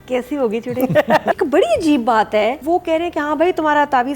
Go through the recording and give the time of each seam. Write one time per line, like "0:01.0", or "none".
0:01.4
0:02.6

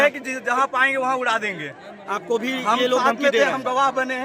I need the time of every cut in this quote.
none

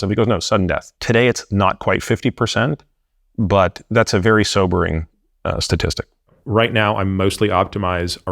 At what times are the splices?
0:00.9
0:06.4

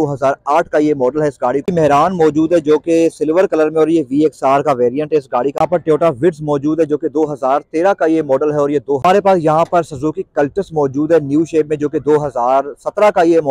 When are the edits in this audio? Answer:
0:01.6
0:05.6
0:09.0

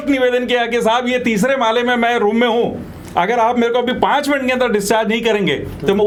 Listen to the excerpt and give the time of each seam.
none

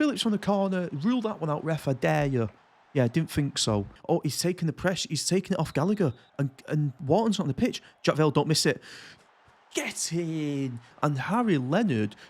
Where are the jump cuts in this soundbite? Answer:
0:03.9
0:10.9

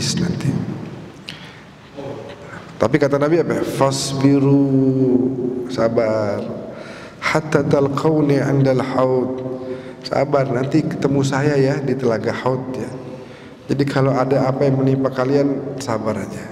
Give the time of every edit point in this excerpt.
none

